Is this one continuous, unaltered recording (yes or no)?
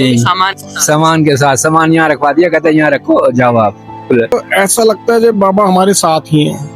no